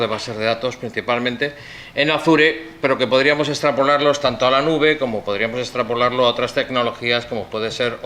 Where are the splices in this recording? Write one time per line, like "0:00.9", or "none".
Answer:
0:04.2